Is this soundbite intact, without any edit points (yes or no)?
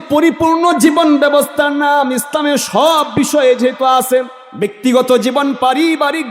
no